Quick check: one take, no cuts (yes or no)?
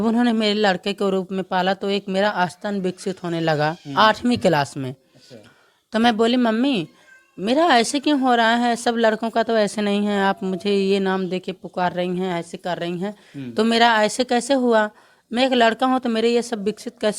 yes